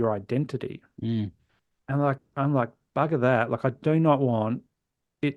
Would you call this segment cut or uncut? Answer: uncut